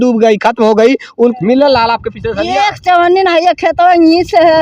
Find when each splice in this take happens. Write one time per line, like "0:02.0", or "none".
0:01.3